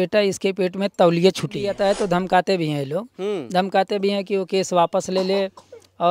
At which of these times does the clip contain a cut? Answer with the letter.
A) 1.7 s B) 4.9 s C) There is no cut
A